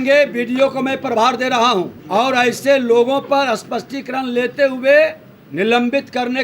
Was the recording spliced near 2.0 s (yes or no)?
yes